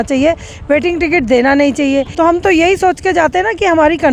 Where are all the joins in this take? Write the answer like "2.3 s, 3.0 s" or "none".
2.1 s